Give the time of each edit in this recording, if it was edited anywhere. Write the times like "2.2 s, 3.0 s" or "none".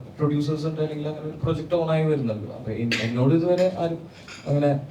none